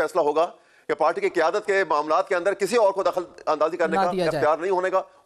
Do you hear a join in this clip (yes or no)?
no